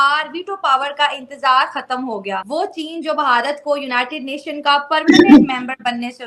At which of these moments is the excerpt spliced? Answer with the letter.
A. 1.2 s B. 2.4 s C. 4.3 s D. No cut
B